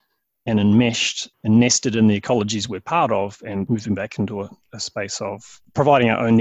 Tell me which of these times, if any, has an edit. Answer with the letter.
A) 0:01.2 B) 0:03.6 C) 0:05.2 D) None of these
B